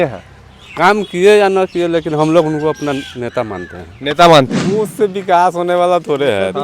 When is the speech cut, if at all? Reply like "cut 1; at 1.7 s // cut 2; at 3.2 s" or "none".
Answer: cut 1; at 4.6 s